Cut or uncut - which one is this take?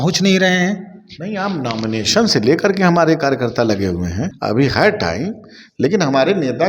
cut